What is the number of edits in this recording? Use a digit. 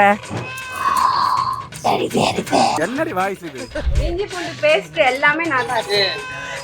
1